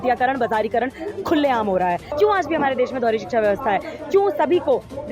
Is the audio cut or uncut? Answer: cut